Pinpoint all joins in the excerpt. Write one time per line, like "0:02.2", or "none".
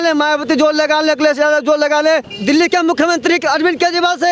0:02.3